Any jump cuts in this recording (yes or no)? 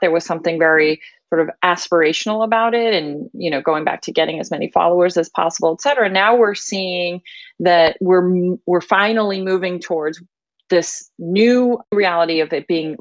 yes